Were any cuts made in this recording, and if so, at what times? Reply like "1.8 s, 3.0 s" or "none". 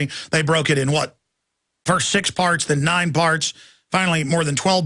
1.3 s